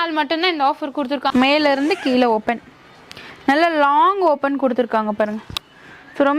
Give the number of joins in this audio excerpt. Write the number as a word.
one